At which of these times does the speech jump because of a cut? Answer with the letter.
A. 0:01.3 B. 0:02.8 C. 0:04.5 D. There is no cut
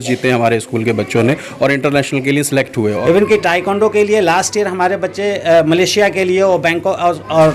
B